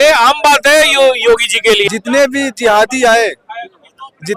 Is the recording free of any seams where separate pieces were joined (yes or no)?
no